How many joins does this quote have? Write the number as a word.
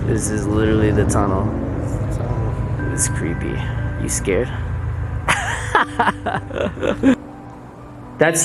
one